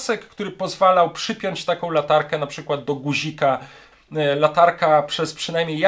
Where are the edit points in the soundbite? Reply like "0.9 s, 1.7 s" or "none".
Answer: 3.8 s